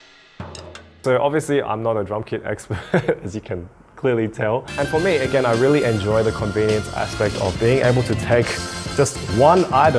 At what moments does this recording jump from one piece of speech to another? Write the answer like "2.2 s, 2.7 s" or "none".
1.0 s, 4.7 s